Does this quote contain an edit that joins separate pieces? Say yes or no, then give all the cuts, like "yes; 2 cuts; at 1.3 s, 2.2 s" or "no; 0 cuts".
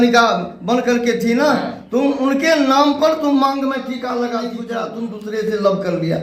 yes; 1 cut; at 4.6 s